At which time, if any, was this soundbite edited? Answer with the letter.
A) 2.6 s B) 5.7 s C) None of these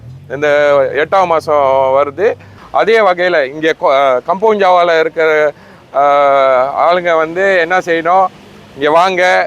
A